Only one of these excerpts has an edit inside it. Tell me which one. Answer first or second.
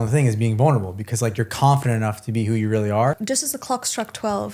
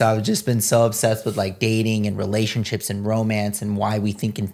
first